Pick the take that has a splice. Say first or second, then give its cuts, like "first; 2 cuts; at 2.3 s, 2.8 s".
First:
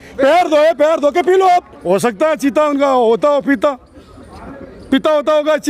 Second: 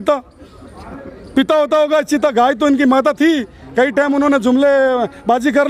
first; 1 cut; at 1.7 s